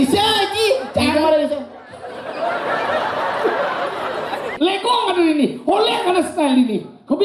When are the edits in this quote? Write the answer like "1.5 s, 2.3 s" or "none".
4.5 s